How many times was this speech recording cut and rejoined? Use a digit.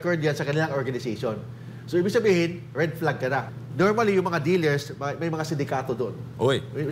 1